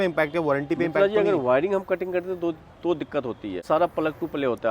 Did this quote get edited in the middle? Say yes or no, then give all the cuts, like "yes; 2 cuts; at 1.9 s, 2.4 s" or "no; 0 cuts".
yes; 1 cut; at 3.6 s